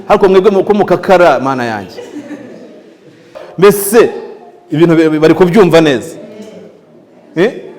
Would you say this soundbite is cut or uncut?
cut